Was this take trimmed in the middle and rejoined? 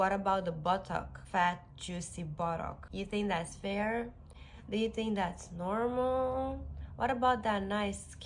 yes; 2 cuts; at 1.3 s, 2.8 s

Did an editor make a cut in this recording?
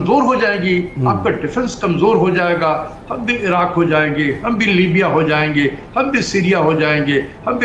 no; 0 cuts

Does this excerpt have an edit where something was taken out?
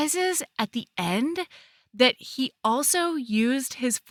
no; 0 cuts

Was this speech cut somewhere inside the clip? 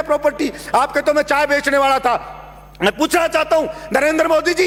no; 0 cuts

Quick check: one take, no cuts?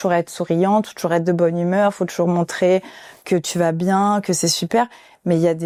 yes; 0 cuts

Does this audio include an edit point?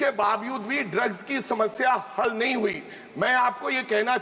no; 0 cuts

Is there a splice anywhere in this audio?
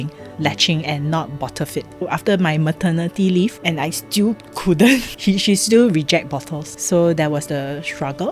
yes; 4 cuts; at 2.1 s, 3.6 s, 5.1 s, 6.7 s

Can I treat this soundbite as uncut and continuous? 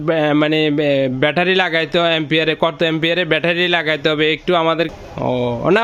no; 1 cut; at 4.9 s

